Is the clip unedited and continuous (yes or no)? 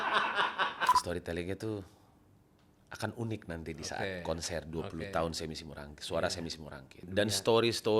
no